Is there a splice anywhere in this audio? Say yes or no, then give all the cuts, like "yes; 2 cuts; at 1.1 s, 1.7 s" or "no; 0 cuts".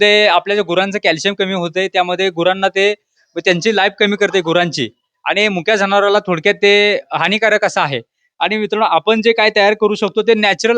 no; 0 cuts